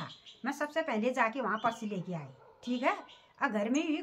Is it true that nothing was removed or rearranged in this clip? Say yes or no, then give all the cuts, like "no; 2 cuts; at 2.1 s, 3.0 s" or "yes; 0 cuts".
yes; 0 cuts